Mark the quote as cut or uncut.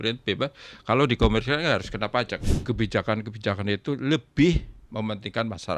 cut